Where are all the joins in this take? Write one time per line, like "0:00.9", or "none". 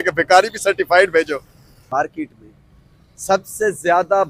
0:01.8

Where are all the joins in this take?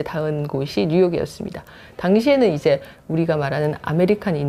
none

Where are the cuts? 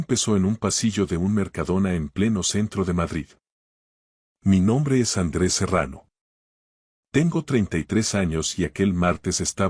0:00.9

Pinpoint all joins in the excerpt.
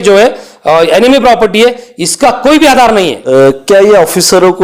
0:03.2

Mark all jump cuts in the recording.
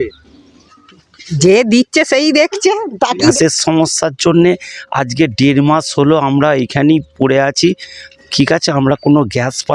0:03.3

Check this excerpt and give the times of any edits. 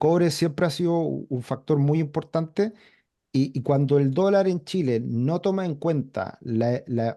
none

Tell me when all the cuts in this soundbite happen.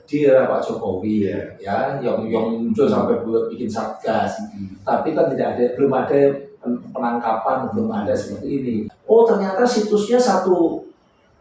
0:08.9

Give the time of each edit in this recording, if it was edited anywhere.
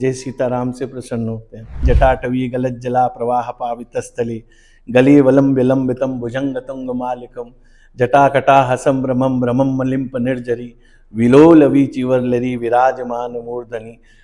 0:01.8

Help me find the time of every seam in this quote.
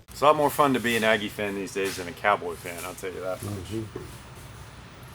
none

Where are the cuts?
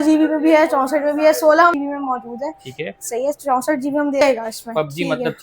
0:01.7
0:04.2

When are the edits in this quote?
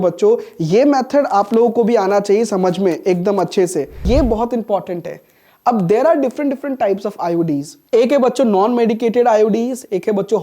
0:04.1
0:07.7

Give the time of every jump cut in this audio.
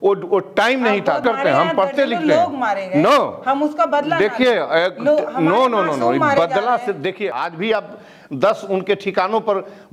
0:01.2
0:07.3

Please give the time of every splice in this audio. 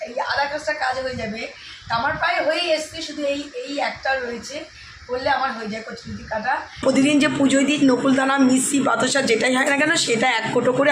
0:06.8

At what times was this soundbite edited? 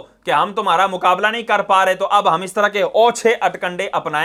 none

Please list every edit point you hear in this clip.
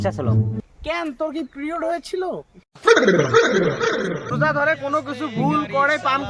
0:04.3

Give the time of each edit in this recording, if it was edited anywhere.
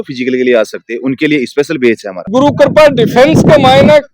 0:02.1

